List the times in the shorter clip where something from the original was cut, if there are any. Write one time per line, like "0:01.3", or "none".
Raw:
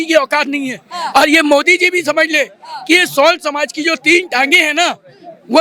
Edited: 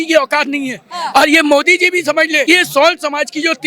0:02.4

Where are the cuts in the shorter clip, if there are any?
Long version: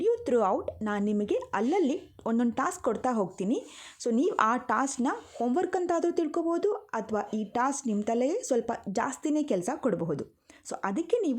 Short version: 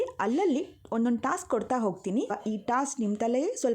0:02.4

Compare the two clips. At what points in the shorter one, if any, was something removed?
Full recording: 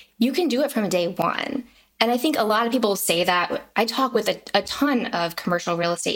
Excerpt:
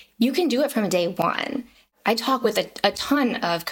0:01.9

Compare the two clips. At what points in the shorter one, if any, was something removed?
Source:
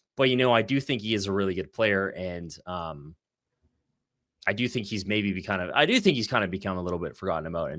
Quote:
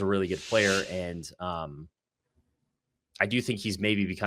none

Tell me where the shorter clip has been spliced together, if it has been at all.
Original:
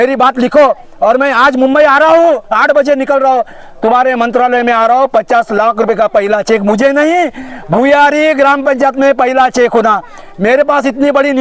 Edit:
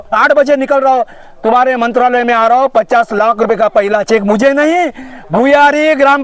none

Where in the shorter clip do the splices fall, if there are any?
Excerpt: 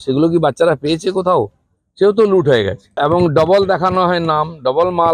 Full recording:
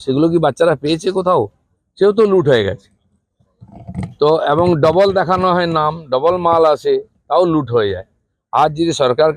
0:03.0

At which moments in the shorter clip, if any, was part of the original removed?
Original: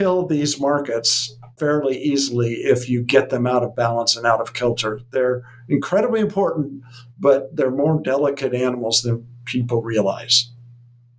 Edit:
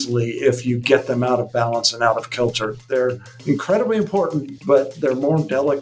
0:04.5

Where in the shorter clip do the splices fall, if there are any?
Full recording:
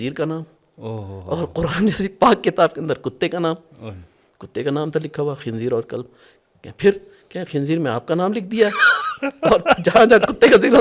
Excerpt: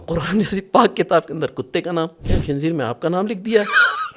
0:02.3

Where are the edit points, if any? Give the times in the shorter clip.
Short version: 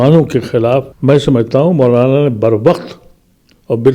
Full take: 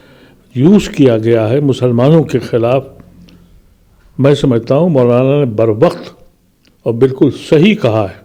0:00.9

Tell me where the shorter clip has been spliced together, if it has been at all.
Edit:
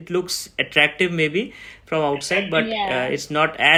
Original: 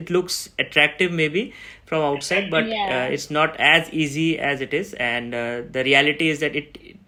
none

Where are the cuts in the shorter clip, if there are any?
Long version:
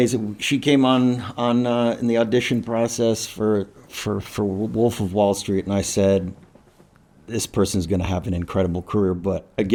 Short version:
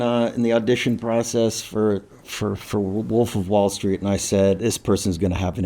0:04.6

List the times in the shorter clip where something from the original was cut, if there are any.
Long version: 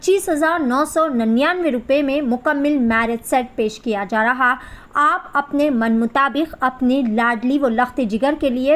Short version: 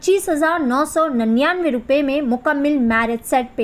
none

